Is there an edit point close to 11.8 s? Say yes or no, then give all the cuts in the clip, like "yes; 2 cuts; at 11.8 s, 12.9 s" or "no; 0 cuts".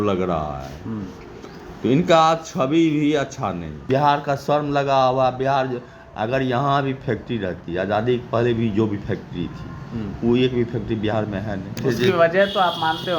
yes; 2 cuts; at 3.8 s, 11.8 s